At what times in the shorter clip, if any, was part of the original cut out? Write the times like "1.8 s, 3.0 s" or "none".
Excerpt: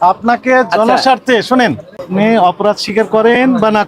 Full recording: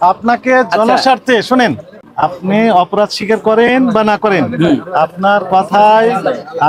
2.1 s